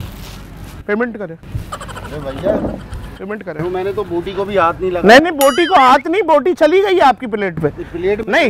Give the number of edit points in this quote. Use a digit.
0